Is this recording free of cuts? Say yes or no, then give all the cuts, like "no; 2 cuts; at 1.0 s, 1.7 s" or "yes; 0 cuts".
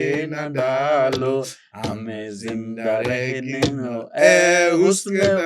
yes; 0 cuts